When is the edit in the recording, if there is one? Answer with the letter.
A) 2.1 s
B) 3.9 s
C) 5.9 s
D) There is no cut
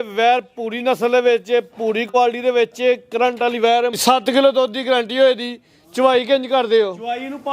B